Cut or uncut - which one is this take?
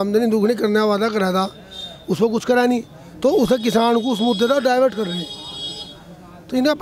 uncut